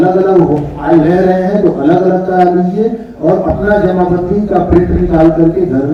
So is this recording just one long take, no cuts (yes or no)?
yes